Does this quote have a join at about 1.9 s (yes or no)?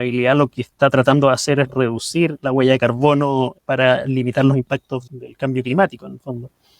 no